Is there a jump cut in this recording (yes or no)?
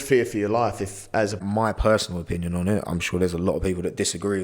yes